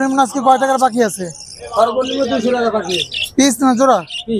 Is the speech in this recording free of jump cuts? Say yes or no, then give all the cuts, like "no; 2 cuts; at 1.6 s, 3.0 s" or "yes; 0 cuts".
yes; 0 cuts